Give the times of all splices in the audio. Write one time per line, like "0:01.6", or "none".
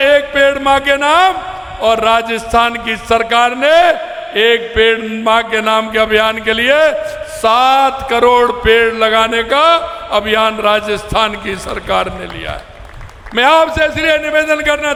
none